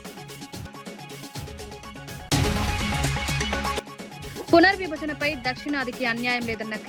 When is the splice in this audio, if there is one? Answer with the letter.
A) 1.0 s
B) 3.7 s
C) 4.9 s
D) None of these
A